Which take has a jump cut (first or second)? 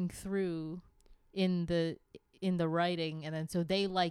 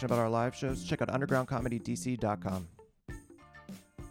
second